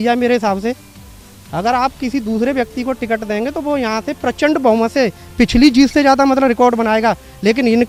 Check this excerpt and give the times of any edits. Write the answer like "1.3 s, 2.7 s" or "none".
none